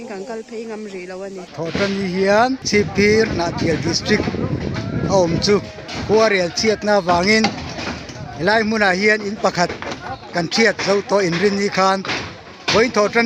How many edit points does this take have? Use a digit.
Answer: 2